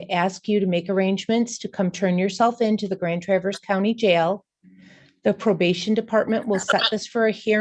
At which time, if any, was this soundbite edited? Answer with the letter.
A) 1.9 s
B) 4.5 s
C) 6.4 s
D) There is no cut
D